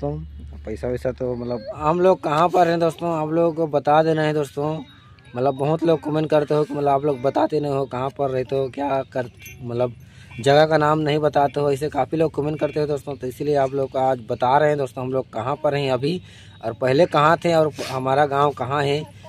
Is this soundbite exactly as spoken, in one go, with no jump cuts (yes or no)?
no